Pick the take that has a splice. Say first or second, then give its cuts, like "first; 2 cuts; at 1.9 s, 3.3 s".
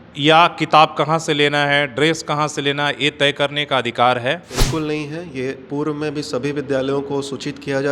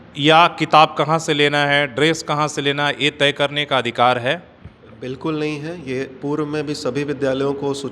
first; 1 cut; at 4.5 s